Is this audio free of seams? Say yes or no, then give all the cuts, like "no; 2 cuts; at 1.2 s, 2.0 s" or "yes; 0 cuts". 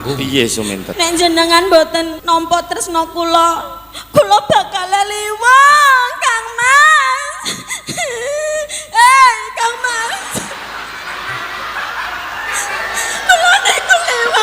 no; 2 cuts; at 0.9 s, 2.2 s